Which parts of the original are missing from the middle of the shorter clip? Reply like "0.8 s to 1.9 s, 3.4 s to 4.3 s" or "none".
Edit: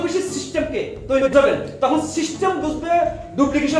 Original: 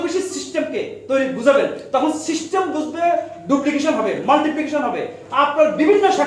1.3 s to 1.4 s